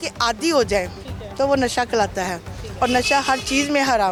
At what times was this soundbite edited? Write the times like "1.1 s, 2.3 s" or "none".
none